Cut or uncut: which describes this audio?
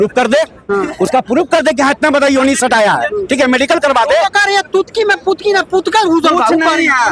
uncut